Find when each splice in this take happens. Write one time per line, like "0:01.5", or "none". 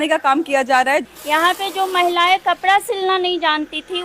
0:01.1